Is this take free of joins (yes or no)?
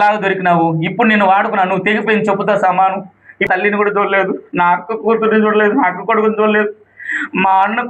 no